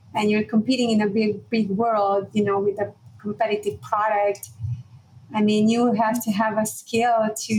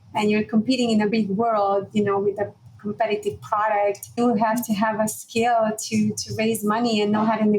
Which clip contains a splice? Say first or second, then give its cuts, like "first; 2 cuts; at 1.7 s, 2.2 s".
second; 2 cuts; at 1.1 s, 4.2 s